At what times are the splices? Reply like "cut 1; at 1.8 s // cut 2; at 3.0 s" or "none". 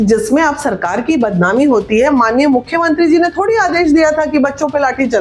none

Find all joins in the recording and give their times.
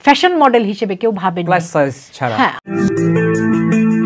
cut 1; at 2.6 s

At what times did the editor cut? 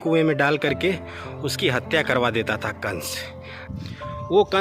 cut 1; at 3.7 s

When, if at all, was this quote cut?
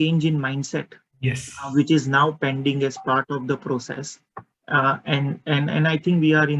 none

